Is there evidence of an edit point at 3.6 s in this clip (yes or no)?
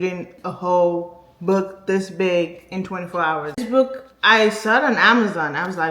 yes